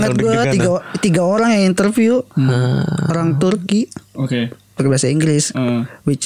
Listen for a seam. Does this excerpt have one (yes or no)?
no